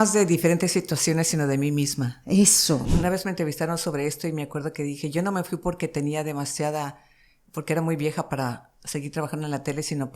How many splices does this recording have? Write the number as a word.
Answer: one